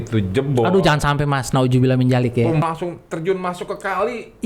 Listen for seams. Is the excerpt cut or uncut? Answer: cut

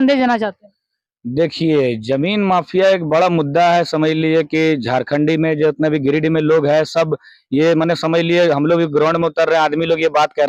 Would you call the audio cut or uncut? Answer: uncut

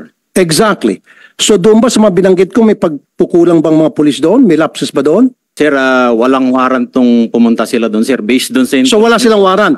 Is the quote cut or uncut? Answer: cut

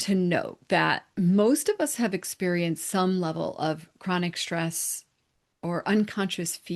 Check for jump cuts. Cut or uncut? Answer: cut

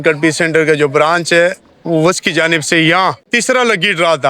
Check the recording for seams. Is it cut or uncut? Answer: cut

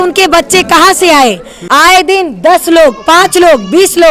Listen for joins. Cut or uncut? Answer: cut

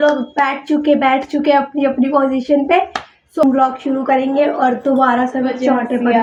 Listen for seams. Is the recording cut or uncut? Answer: uncut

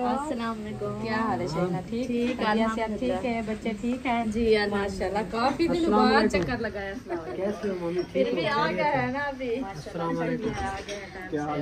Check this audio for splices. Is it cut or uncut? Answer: uncut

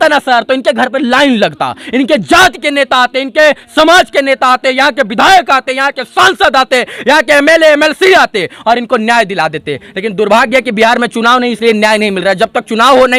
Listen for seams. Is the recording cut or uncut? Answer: uncut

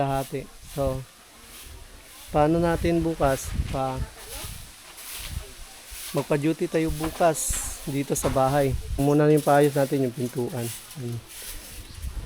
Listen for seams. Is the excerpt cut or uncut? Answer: cut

